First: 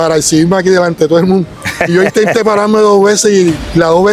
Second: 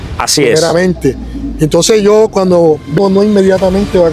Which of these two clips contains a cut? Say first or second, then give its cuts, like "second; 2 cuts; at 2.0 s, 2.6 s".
second; 1 cut; at 3.0 s